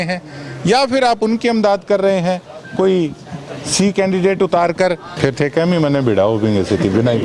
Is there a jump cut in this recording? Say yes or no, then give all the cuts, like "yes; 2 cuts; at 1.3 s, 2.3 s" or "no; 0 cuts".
yes; 1 cut; at 5.1 s